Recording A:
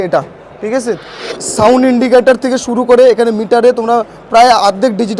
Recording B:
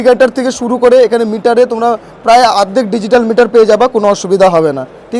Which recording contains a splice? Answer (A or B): A